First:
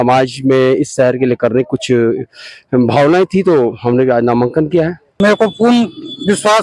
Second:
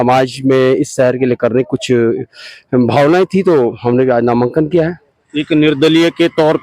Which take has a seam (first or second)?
first